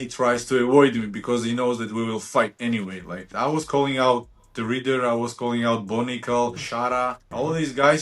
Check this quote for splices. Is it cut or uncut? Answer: cut